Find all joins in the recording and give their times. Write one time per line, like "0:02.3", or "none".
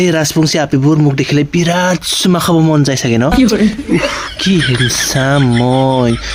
none